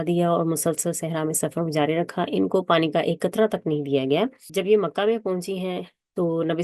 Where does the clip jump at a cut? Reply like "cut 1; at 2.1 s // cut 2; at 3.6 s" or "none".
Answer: cut 1; at 4.5 s